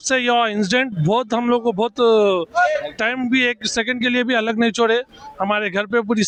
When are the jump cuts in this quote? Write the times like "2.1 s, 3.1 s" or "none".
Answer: none